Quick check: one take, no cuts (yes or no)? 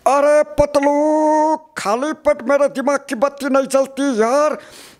yes